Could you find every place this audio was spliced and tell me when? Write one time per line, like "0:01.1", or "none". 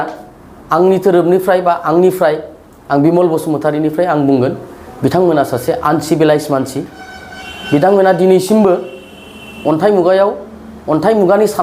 none

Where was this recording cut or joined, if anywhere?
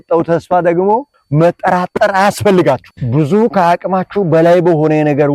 0:02.9

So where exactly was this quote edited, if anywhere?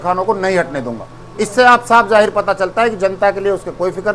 none

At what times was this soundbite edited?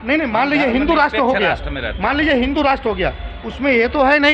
none

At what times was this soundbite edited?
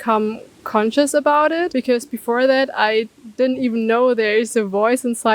0:01.7

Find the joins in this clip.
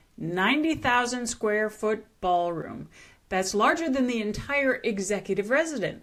none

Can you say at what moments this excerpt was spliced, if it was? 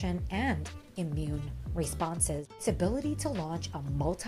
0:02.6

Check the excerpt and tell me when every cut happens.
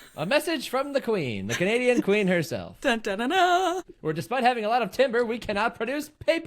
0:04.0

